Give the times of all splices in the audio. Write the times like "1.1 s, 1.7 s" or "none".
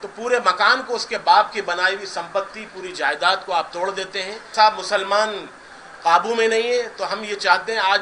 4.5 s